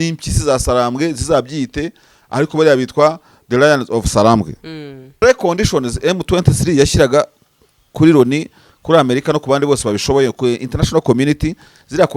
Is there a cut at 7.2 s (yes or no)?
no